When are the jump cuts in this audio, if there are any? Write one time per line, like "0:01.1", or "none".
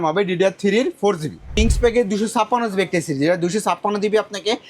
0:01.5